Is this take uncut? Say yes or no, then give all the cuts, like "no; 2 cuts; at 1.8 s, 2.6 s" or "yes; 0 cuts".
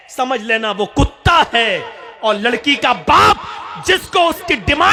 yes; 0 cuts